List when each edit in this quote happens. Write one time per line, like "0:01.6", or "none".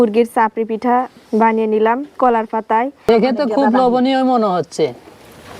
0:03.1

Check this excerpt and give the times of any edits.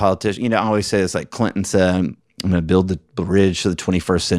none

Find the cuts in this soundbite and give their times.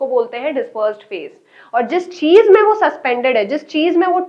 none

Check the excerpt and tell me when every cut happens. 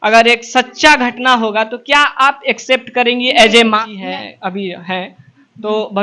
0:03.9

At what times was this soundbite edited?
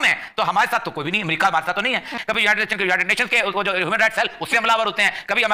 none

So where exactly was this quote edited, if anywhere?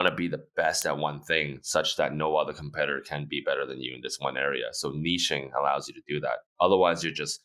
none

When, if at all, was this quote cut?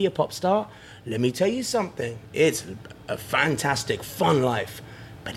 none

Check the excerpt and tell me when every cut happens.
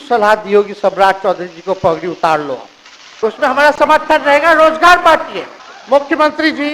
0:03.1
0:05.4

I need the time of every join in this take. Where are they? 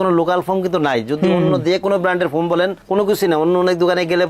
none

